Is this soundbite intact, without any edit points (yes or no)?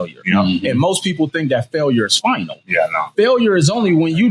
yes